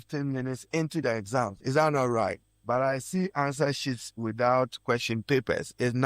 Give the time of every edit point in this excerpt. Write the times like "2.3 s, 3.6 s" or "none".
2.5 s